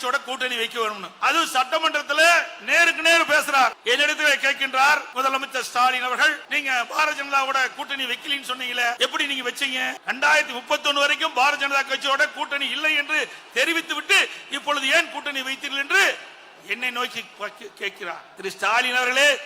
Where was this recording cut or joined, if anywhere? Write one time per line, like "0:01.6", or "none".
0:01.1
0:03.8
0:05.1
0:06.5
0:09.0
0:10.0
0:18.3